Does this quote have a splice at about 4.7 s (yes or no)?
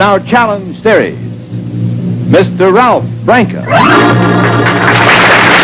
yes